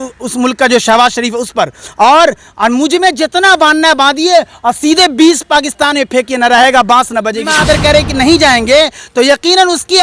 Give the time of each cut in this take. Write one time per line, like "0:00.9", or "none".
0:07.5